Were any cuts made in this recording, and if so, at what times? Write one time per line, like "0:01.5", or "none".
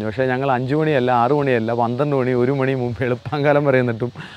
none